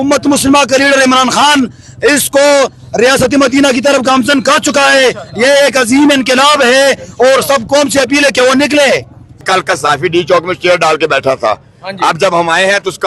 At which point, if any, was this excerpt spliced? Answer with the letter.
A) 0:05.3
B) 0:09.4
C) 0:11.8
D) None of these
B